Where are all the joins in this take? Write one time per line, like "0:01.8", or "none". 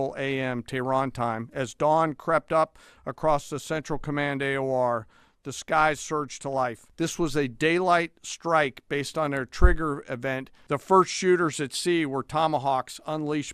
0:06.8
0:10.5